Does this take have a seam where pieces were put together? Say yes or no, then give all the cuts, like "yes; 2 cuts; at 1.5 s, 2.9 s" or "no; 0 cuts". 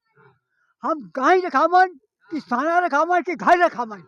no; 0 cuts